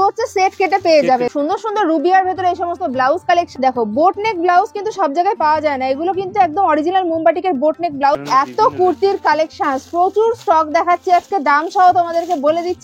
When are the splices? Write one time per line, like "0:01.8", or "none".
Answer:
0:01.3
0:03.5
0:08.2